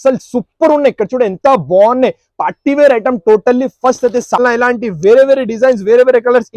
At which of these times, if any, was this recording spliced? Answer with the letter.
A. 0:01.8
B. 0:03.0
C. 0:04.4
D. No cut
C